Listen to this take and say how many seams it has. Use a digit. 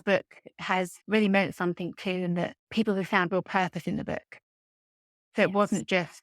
1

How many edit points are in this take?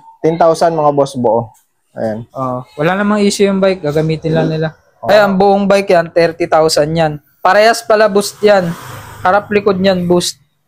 1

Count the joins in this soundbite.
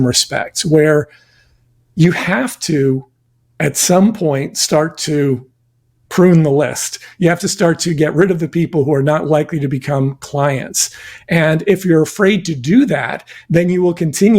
0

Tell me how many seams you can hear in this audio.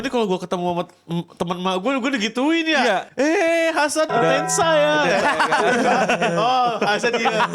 2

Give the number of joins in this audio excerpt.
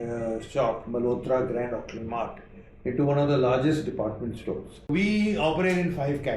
1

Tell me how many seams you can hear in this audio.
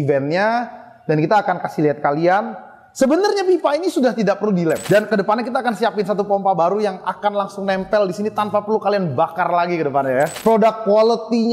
2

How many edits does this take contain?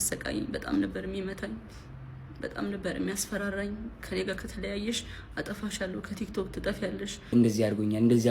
1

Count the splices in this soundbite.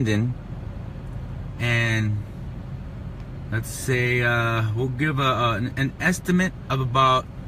1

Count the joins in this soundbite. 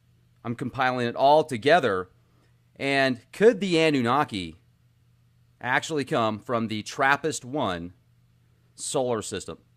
0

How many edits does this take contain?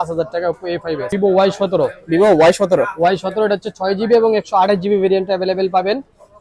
1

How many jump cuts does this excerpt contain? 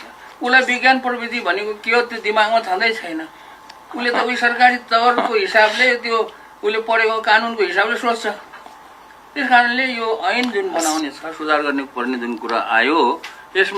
0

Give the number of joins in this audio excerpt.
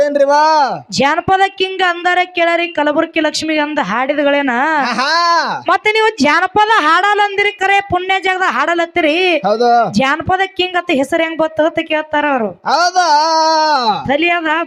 0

